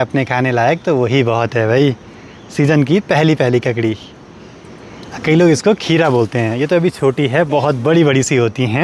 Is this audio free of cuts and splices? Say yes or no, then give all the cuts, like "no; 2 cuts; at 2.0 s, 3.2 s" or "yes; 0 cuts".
yes; 0 cuts